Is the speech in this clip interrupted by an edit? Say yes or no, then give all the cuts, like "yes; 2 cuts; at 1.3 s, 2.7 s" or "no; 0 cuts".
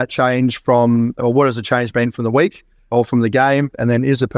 yes; 1 cut; at 2.9 s